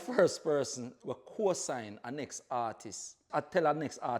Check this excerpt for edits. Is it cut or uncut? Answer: cut